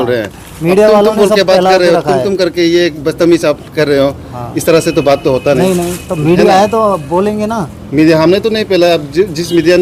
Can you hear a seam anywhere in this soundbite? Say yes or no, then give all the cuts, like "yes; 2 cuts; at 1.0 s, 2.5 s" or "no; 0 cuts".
no; 0 cuts